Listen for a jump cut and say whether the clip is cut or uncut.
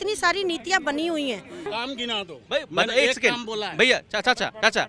cut